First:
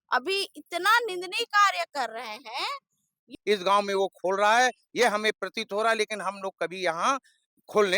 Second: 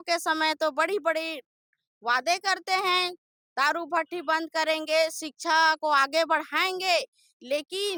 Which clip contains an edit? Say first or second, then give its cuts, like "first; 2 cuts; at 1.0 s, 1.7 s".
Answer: first; 1 cut; at 3.4 s